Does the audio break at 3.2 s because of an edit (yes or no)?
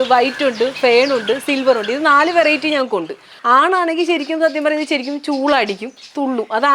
yes